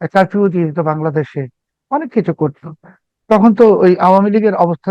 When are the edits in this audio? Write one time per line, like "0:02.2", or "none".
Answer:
none

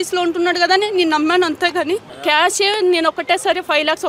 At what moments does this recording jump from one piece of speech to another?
0:02.1

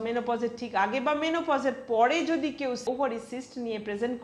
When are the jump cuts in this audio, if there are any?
0:02.8

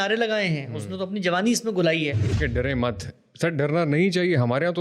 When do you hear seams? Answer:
0:02.4

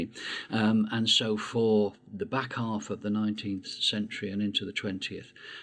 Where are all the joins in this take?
0:02.0

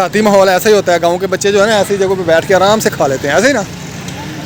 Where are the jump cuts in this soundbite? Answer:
none

